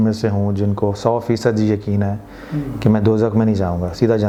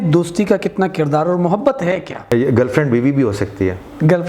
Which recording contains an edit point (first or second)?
second